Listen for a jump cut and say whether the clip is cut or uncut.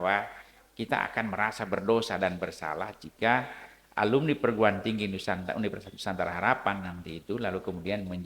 uncut